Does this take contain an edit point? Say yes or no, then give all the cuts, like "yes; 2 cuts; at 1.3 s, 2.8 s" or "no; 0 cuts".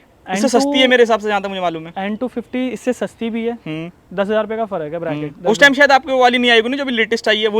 no; 0 cuts